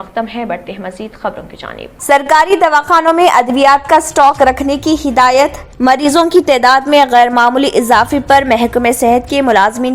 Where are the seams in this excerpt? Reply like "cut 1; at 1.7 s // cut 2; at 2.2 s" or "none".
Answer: cut 1; at 1.9 s